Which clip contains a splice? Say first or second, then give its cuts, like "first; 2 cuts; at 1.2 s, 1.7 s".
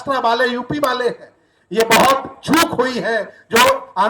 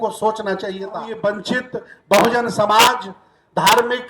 second; 1 cut; at 1.1 s